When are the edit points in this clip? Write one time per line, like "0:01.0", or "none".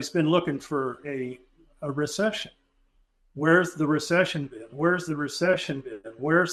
none